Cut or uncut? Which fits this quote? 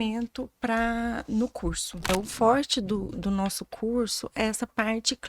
cut